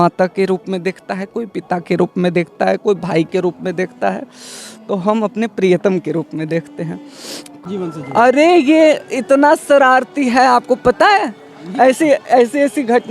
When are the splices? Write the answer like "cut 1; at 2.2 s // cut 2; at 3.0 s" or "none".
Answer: cut 1; at 7.6 s